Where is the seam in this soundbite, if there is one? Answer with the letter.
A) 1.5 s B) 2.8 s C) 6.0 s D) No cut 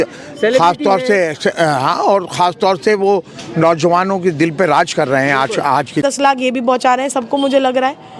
C